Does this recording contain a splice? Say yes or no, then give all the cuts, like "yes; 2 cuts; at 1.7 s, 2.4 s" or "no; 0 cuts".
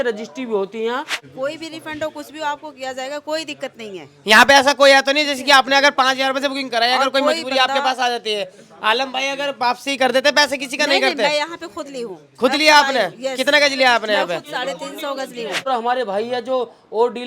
yes; 2 cuts; at 1.2 s, 15.7 s